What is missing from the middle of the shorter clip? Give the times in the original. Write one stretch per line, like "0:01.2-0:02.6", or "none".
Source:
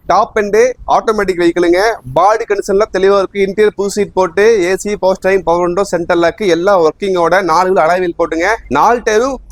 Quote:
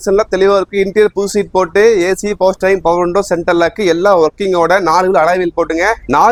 none